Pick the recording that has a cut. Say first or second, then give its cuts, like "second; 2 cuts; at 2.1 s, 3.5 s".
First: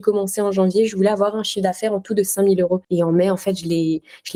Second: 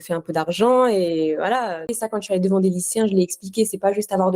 second; 1 cut; at 1.9 s